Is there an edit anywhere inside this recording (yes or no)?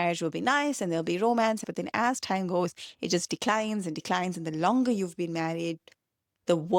yes